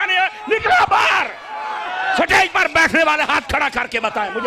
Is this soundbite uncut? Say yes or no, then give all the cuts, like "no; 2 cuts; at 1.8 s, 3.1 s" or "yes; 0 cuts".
yes; 0 cuts